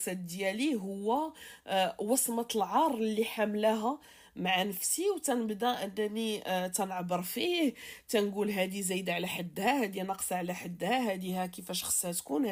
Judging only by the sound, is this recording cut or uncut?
uncut